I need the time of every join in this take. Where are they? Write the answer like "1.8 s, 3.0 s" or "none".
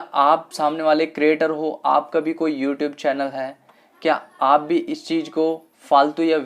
none